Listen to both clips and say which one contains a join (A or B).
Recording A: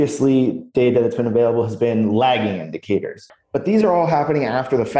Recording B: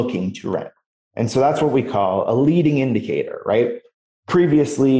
A